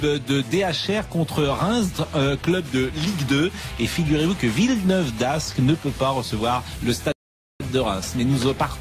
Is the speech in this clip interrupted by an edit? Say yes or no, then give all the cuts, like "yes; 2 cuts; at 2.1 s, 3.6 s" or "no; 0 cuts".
yes; 1 cut; at 3.5 s